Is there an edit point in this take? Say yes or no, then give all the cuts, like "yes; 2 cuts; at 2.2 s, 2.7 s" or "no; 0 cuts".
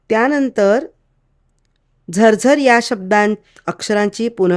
no; 0 cuts